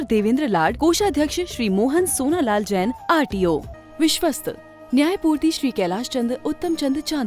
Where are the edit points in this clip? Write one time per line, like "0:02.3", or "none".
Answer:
0:03.7